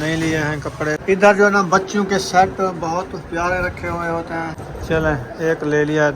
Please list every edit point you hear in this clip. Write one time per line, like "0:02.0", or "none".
0:01.0
0:04.6